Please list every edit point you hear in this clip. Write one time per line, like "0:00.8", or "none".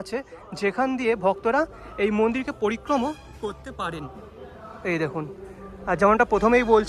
none